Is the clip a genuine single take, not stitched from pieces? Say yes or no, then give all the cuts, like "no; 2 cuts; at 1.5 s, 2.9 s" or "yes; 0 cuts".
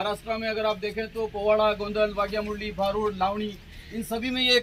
yes; 0 cuts